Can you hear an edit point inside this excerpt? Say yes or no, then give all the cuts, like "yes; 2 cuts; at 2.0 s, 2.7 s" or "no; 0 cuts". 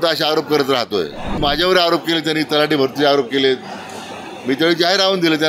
yes; 1 cut; at 1.4 s